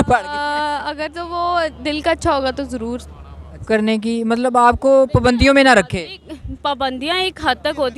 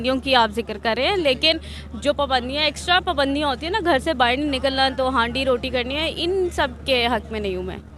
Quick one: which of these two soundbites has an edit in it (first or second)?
first